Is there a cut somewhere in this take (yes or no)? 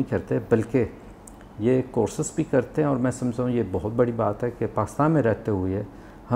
no